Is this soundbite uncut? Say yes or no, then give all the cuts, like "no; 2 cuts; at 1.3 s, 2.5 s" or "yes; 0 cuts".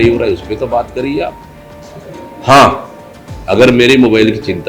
yes; 0 cuts